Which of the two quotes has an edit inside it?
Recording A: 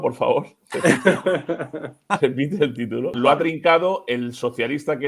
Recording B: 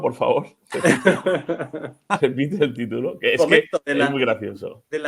A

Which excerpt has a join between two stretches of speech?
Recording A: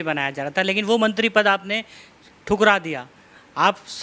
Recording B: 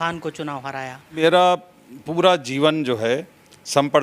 B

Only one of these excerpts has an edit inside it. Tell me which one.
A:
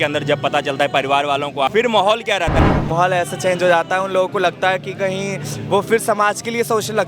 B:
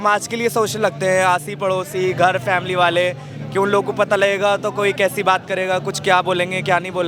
A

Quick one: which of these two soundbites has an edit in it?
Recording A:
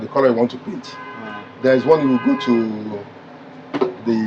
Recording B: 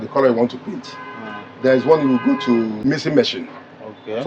B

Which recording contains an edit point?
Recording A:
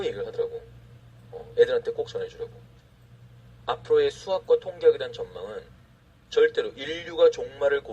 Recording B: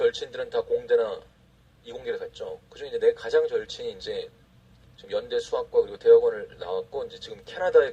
A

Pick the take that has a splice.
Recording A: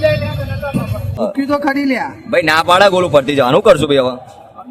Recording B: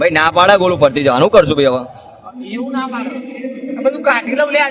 A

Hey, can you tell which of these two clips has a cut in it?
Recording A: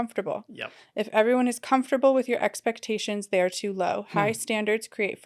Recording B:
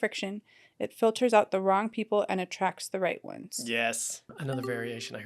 B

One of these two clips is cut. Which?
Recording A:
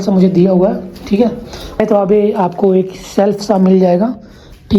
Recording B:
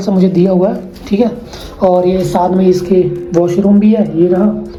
A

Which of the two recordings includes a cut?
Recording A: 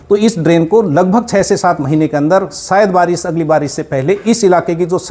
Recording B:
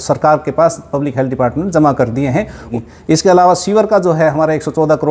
B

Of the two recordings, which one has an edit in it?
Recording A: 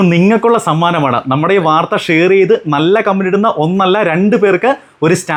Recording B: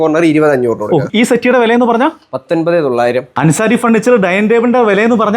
B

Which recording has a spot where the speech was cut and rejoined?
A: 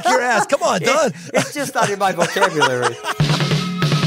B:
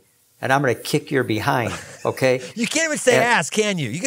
A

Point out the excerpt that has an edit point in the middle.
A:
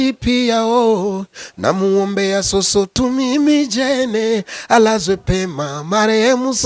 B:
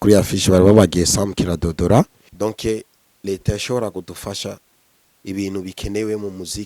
B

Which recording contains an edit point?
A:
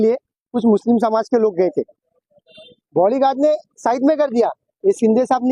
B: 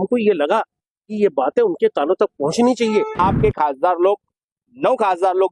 B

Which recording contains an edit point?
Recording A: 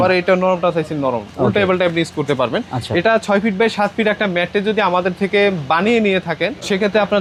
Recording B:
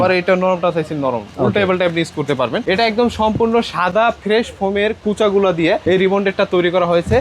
B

